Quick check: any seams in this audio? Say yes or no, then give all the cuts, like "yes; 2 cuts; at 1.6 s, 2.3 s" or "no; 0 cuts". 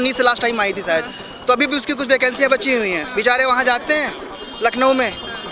no; 0 cuts